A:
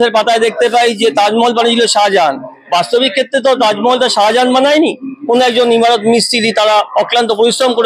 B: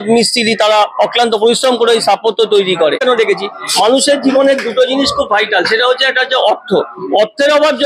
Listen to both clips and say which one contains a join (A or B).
B